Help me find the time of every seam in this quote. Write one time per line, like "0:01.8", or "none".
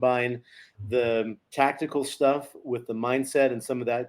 0:01.4

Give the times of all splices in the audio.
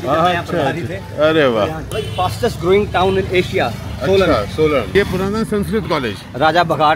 0:01.9
0:04.9

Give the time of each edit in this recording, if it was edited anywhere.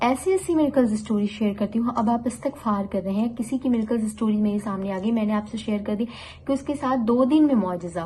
none

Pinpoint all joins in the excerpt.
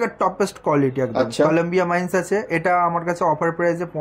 none

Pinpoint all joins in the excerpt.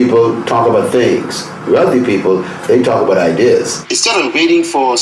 0:03.8

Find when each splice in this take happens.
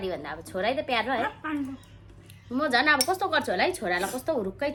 none

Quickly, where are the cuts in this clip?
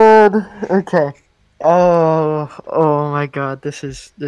none

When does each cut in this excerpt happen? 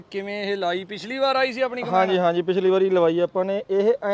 none

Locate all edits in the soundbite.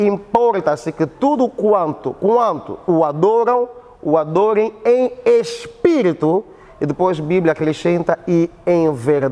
none

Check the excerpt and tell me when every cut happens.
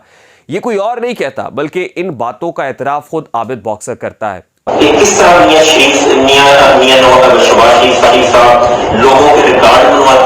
0:04.7

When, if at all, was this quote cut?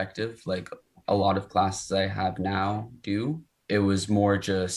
0:03.5

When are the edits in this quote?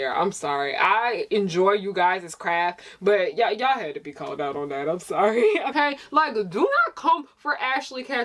0:05.7

